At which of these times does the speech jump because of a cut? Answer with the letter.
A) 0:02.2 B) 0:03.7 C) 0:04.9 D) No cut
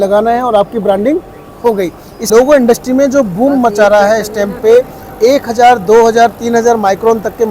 A